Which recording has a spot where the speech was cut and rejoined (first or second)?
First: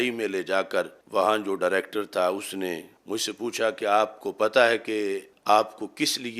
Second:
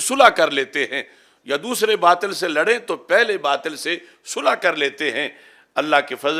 first